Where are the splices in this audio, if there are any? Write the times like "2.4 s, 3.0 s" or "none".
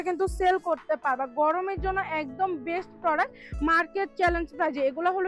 none